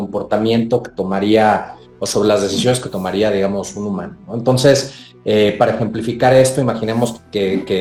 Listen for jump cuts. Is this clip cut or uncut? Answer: uncut